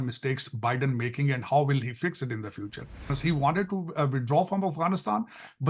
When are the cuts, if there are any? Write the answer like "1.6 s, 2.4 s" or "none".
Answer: 3.1 s